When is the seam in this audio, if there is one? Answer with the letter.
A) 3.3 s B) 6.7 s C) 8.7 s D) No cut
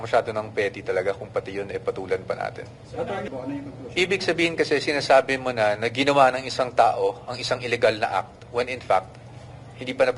A